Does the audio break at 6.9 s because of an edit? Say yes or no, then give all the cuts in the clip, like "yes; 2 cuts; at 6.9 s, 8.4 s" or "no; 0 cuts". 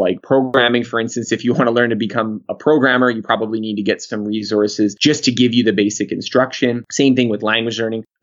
yes; 2 cuts; at 5.0 s, 6.9 s